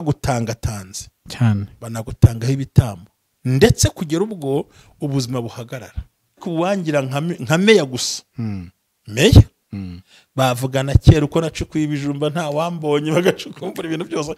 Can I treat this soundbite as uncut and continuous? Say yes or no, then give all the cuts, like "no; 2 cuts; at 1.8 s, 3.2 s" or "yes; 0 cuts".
no; 1 cut; at 6.4 s